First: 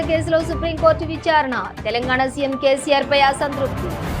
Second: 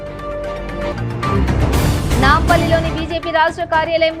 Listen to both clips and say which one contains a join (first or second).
second